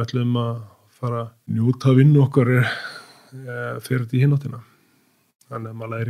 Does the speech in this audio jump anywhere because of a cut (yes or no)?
yes